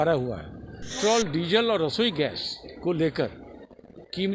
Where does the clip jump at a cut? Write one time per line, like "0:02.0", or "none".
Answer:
0:01.0